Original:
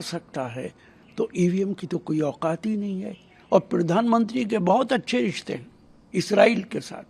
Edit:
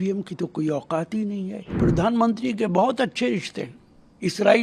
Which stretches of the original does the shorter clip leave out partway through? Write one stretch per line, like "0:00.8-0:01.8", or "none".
0:03.3-0:03.7